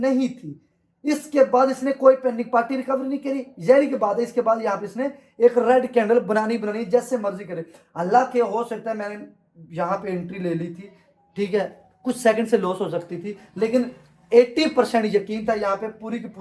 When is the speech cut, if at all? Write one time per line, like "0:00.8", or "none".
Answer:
none